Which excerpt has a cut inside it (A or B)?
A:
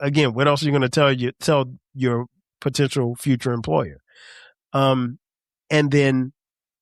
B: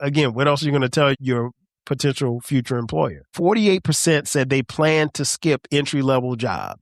B